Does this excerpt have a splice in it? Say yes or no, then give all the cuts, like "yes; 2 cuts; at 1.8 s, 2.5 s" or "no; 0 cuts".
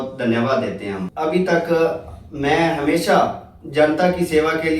yes; 1 cut; at 1.1 s